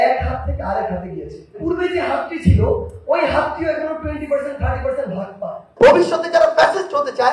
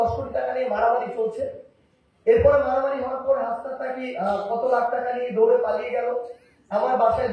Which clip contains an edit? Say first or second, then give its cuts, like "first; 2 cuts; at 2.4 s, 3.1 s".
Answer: first; 2 cuts; at 1.6 s, 5.7 s